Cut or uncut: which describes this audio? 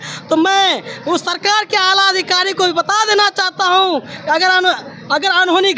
uncut